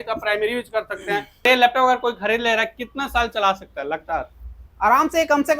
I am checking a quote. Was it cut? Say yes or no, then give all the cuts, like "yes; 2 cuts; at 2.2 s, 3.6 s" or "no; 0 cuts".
yes; 1 cut; at 1.5 s